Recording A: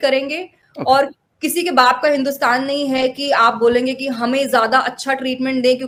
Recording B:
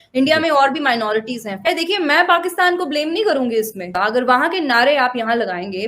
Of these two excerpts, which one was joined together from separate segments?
B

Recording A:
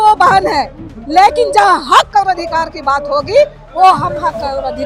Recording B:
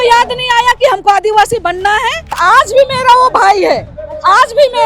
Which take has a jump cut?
B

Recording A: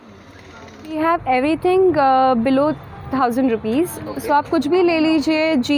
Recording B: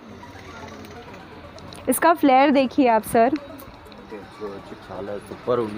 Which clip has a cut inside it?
A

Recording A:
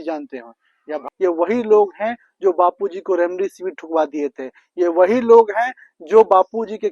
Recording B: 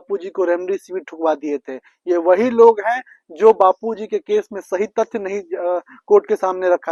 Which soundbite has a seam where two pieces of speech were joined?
A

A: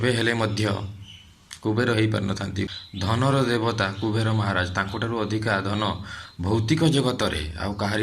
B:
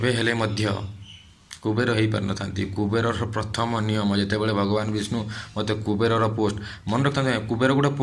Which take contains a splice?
A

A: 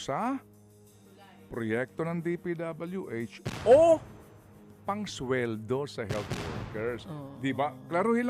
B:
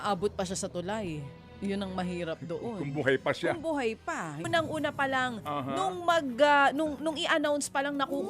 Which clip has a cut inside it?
B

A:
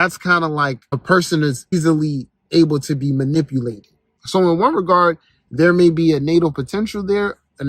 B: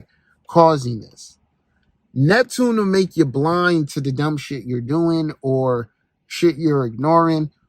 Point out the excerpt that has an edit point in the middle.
A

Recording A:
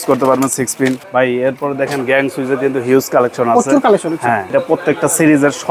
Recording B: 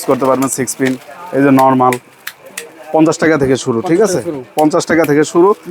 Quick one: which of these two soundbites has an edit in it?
A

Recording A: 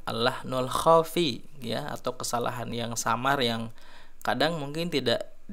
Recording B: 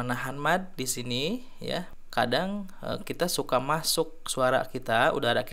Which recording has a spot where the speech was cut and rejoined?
B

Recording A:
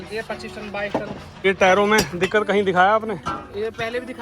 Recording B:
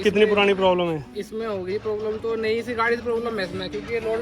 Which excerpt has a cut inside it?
A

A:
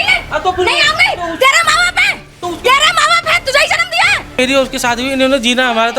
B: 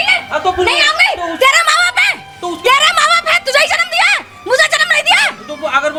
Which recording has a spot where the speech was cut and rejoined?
A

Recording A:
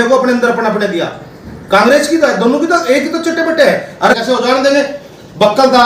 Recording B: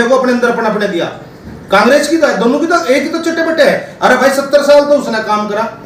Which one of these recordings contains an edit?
A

